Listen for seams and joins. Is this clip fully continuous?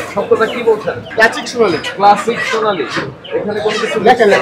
no; 1 cut; at 1.0 s

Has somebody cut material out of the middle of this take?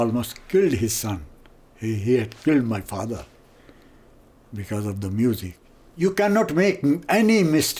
yes; 1 cut; at 5.6 s

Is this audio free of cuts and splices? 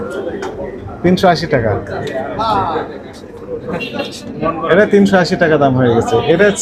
yes; 0 cuts

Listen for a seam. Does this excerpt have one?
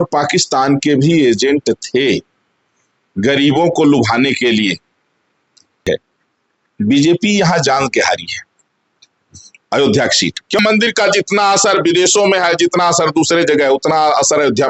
yes; 2 cuts; at 5.9 s, 10.6 s

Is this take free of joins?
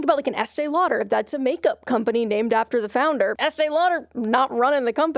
no; 1 cut; at 3.4 s

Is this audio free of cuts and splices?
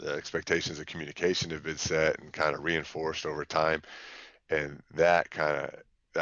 yes; 0 cuts

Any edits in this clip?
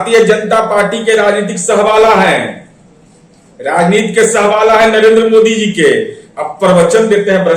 no; 0 cuts

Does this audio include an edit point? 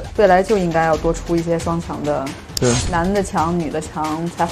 no; 0 cuts

